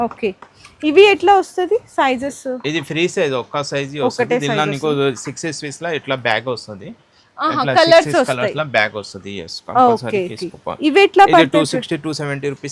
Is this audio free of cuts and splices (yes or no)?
yes